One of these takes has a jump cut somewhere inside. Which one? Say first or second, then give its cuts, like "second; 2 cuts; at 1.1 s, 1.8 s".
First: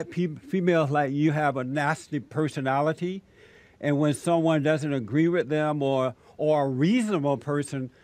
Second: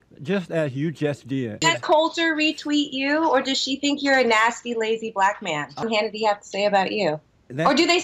second; 2 cuts; at 1.5 s, 5.8 s